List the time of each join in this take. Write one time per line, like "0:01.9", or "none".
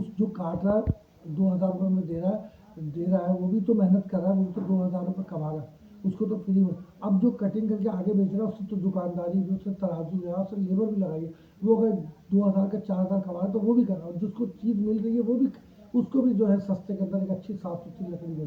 none